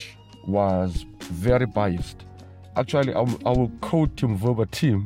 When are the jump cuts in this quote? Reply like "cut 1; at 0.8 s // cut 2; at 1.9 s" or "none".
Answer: none